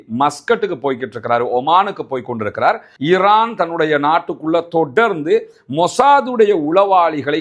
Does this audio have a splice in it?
yes; 1 cut; at 2.9 s

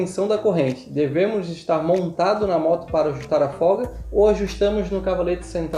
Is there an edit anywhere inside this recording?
no; 0 cuts

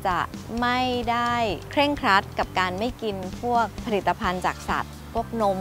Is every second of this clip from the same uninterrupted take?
no; 2 cuts; at 1.6 s, 3.8 s

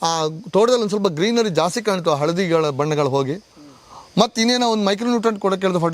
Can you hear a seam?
no; 0 cuts

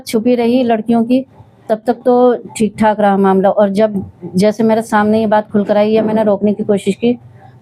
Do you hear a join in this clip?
no; 0 cuts

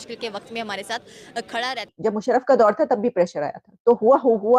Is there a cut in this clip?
yes; 1 cut; at 1.9 s

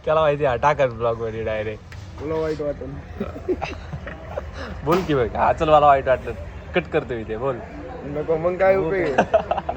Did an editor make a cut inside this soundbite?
no; 0 cuts

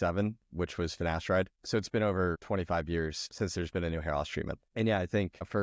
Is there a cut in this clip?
no; 0 cuts

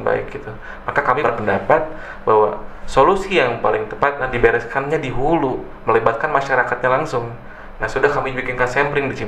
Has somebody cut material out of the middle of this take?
yes; 2 cuts; at 1.2 s, 4.2 s

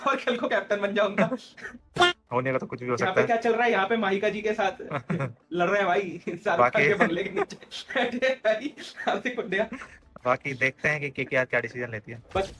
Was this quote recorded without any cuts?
yes; 0 cuts

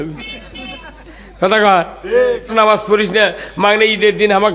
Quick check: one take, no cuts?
no; 1 cut; at 2.5 s

